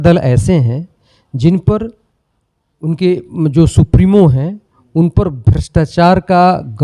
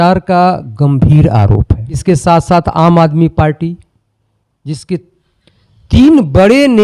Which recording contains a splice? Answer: second; 1 cut; at 2.0 s

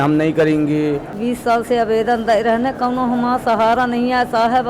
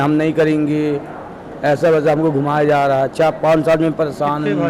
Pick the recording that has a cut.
first; 1 cut; at 1.2 s

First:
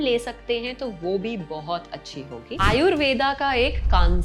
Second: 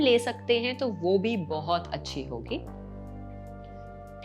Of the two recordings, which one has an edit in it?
first; 1 cut; at 2.5 s

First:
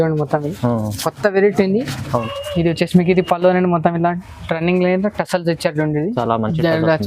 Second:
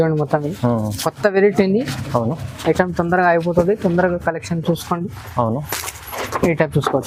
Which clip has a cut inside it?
first; 1 cut; at 2.0 s

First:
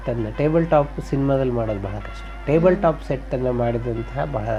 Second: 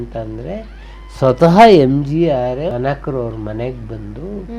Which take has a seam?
second; 1 cut; at 2.7 s

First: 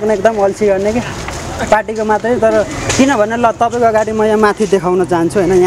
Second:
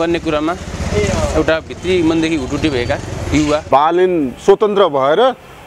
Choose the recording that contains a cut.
second; 1 cut; at 3.6 s

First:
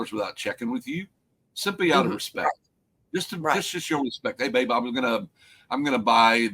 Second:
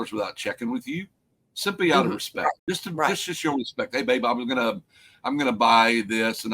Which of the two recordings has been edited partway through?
second; 1 cut; at 2.6 s

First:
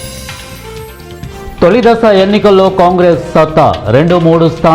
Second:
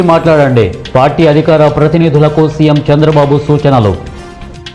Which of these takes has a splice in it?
first; 1 cut; at 1.4 s

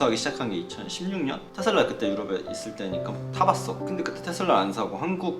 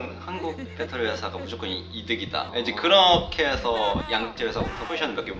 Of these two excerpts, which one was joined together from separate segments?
first; 2 cuts; at 1.4 s, 3.8 s

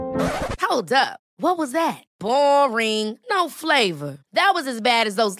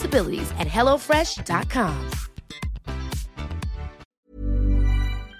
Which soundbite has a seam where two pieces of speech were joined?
second; 1 cut; at 4.0 s

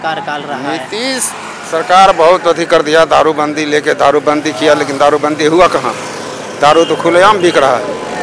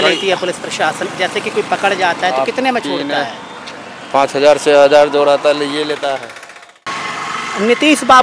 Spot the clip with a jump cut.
second; 1 cut; at 6.9 s

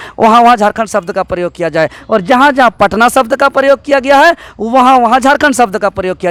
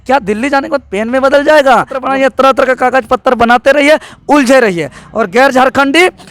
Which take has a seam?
second; 1 cut; at 2.0 s

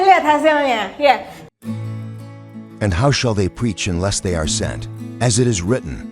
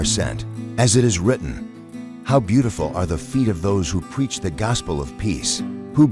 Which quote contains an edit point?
first; 1 cut; at 1.4 s

